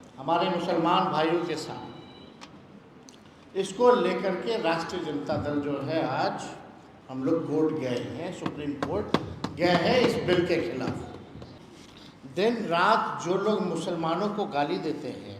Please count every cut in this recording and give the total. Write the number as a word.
one